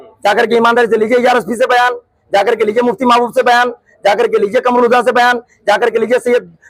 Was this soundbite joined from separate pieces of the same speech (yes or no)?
no